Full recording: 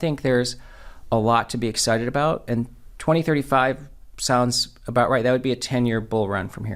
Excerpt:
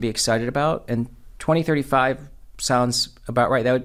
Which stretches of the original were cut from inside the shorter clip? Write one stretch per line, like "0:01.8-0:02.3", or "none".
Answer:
none